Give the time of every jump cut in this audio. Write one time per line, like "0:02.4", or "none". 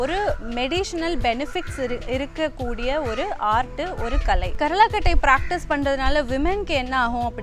0:04.5